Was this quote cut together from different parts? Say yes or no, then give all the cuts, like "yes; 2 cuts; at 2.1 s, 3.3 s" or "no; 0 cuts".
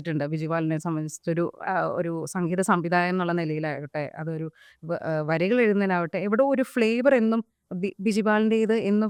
no; 0 cuts